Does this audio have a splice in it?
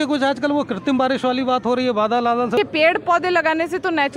yes; 1 cut; at 2.6 s

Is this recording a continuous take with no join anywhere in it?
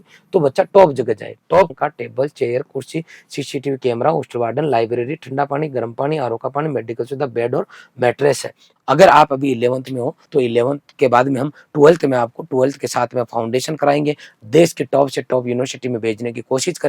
no; 3 cuts; at 1.7 s, 8.7 s, 10.3 s

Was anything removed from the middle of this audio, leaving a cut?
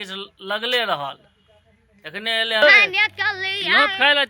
yes; 1 cut; at 2.6 s

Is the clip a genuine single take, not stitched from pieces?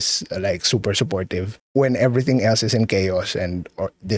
yes; 0 cuts

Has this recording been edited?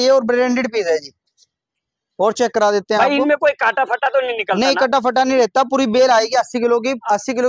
no; 0 cuts

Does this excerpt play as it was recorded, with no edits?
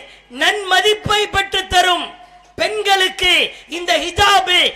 yes; 0 cuts

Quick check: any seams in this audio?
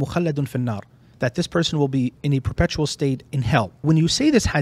yes; 3 cuts; at 1.0 s, 2.2 s, 3.7 s

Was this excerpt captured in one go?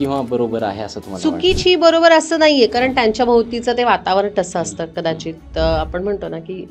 yes; 0 cuts

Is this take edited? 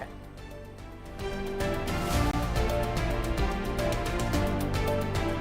yes; 1 cut; at 2.3 s

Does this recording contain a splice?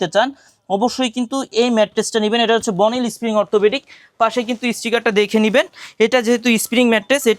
no; 0 cuts

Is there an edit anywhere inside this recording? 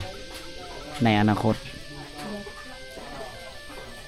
no; 0 cuts

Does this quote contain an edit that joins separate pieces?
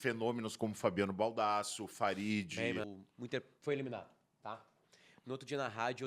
yes; 1 cut; at 2.9 s

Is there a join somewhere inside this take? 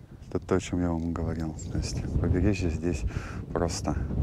no; 0 cuts

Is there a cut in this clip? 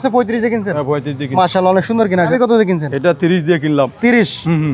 yes; 1 cut; at 2.3 s

